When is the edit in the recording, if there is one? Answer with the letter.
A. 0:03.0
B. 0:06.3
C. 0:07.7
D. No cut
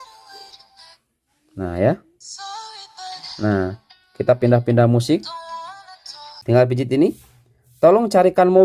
B